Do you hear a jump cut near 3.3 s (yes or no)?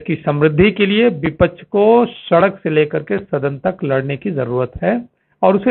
no